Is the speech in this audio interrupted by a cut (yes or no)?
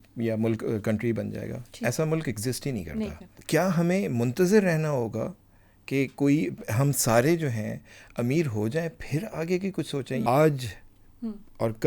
yes